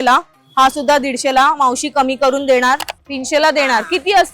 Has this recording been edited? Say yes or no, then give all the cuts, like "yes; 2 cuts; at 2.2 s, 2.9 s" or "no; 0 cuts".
yes; 1 cut; at 2.9 s